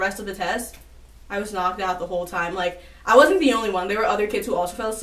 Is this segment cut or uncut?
uncut